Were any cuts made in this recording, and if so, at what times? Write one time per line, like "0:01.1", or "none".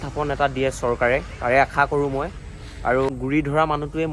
0:03.1